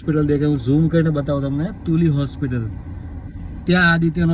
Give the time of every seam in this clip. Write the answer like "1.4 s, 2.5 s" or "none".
none